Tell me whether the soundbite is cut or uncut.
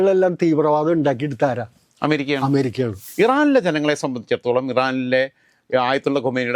cut